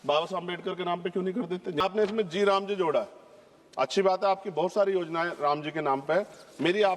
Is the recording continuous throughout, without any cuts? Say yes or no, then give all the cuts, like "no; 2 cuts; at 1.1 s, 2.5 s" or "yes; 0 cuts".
no; 1 cut; at 1.8 s